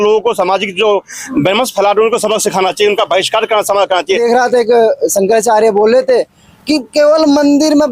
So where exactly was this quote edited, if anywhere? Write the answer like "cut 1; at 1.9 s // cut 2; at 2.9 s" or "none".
cut 1; at 4.2 s